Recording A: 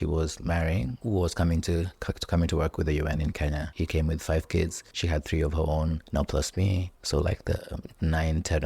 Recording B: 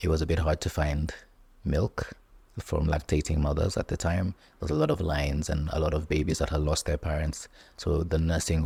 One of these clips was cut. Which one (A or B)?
A